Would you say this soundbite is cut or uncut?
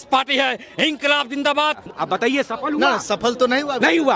cut